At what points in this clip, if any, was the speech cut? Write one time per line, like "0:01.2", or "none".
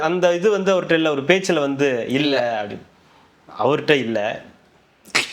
none

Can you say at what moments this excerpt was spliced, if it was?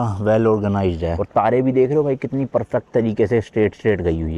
0:01.1

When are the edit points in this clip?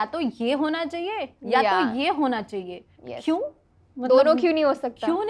none

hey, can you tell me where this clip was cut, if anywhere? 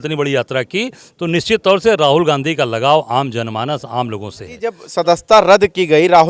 0:04.9

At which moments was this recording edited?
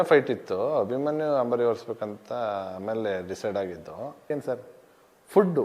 0:04.3

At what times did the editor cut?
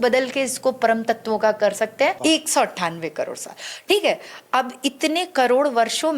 0:02.2

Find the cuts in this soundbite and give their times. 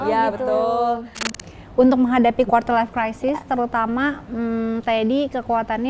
0:01.3

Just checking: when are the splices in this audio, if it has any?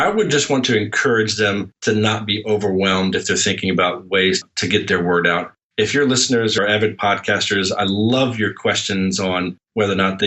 0:01.7

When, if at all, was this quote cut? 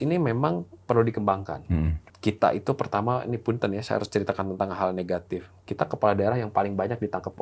0:02.0

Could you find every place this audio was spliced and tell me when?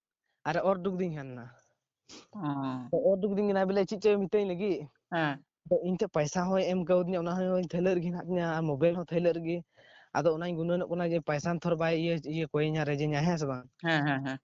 none

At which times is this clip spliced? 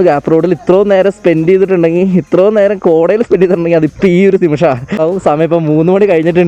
none

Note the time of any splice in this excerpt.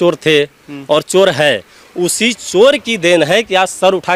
none

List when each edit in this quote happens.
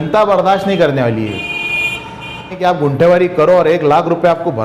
0:02.6

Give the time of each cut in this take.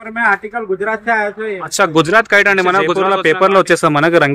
0:03.0

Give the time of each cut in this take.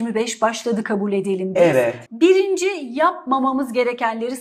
0:02.0

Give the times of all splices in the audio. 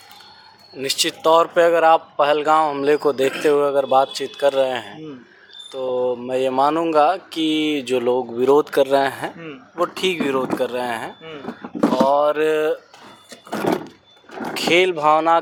none

